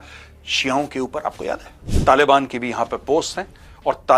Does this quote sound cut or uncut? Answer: cut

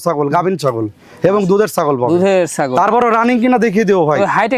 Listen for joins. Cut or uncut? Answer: uncut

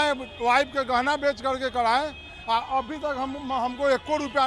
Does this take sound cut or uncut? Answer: uncut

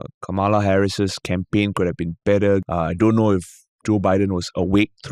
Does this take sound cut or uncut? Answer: cut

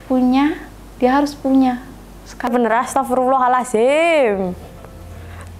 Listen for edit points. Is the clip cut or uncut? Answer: cut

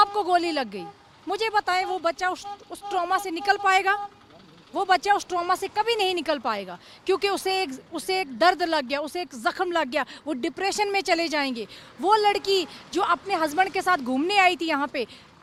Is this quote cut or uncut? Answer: uncut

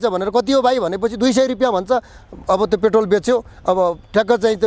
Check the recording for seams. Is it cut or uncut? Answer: uncut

